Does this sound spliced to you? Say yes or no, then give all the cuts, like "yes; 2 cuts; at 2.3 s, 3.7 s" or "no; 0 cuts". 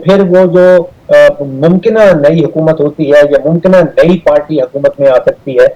no; 0 cuts